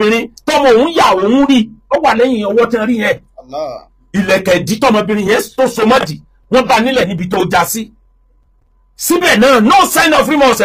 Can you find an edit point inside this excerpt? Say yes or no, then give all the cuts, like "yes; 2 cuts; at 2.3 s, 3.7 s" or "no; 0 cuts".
no; 0 cuts